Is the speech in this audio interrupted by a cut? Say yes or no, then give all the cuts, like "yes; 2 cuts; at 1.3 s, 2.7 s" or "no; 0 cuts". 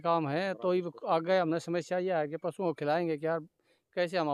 no; 0 cuts